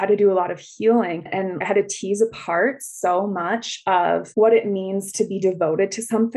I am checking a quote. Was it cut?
yes; 1 cut; at 1.6 s

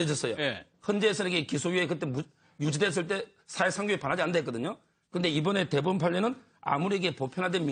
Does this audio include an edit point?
yes; 1 cut; at 2.0 s

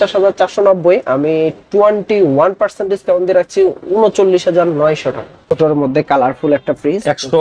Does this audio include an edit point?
yes; 1 cut; at 5.5 s

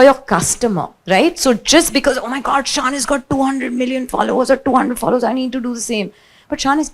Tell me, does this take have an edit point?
yes; 1 cut; at 0.9 s

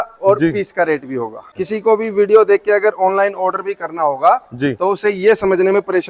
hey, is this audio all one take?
no; 1 cut; at 1.4 s

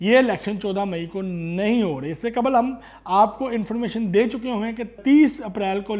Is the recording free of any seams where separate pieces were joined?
no; 1 cut; at 5.0 s

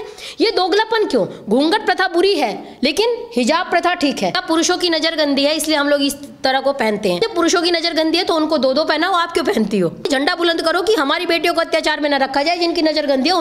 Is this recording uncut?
no; 3 cuts; at 4.4 s, 7.2 s, 10.1 s

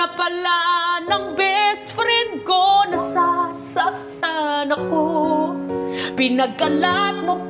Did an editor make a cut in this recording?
no; 0 cuts

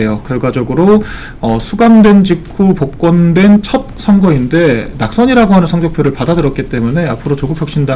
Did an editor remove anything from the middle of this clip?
no; 0 cuts

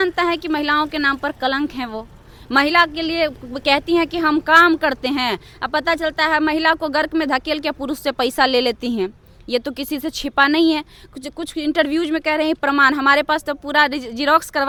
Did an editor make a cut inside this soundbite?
no; 0 cuts

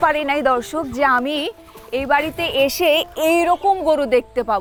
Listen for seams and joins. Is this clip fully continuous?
yes; 0 cuts

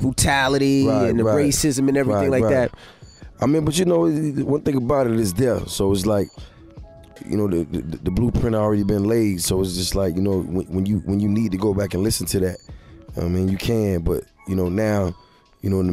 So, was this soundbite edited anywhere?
no; 0 cuts

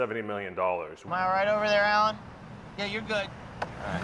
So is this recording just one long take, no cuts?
no; 1 cut; at 1.0 s

